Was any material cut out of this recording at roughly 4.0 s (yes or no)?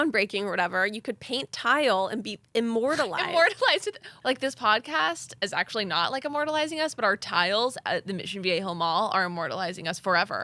yes